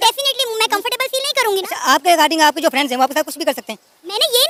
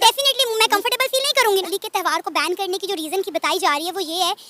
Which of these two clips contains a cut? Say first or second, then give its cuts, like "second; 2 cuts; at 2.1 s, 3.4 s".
second; 1 cut; at 1.7 s